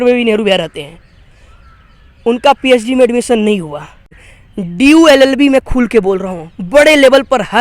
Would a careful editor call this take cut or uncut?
cut